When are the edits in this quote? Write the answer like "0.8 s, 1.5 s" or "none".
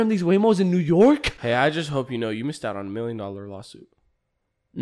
none